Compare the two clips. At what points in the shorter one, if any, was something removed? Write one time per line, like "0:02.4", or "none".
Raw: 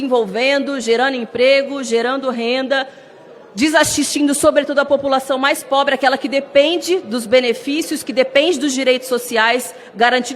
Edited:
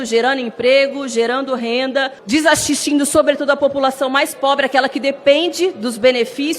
0:02.2